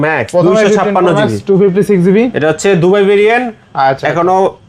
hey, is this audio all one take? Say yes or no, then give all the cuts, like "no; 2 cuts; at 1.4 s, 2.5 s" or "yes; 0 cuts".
yes; 0 cuts